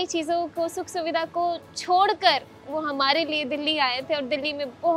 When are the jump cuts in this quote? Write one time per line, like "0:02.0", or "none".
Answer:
none